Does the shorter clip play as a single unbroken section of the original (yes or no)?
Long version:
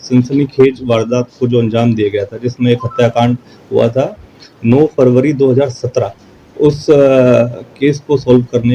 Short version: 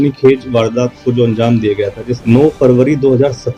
no